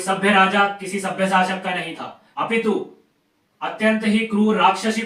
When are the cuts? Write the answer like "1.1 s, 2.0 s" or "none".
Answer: none